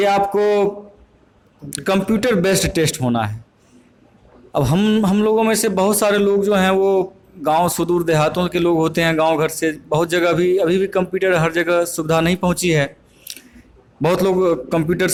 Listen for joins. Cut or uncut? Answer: uncut